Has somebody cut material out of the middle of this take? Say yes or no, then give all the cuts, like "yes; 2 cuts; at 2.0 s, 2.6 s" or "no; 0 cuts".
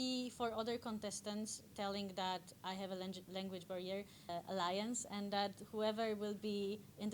yes; 1 cut; at 4.3 s